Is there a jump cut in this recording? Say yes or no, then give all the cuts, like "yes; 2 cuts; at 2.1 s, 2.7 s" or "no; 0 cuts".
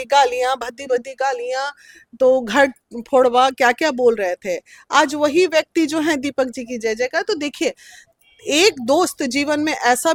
no; 0 cuts